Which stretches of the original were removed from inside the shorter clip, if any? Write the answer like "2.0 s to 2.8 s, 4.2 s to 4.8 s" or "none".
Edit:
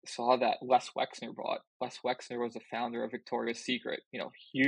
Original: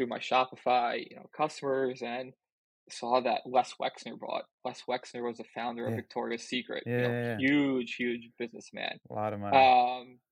none